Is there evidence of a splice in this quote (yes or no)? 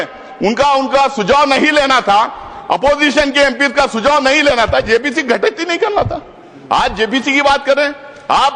no